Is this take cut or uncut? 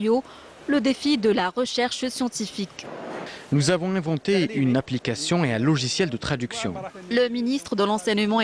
uncut